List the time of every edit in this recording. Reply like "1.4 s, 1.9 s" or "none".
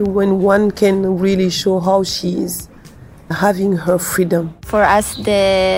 4.6 s

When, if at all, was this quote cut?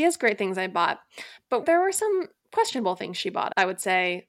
1.6 s, 3.5 s

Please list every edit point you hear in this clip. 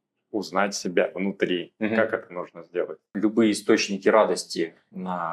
3.1 s

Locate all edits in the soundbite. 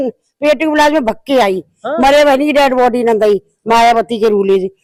none

